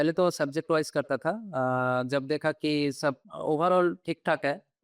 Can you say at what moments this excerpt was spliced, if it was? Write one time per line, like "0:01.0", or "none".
0:03.3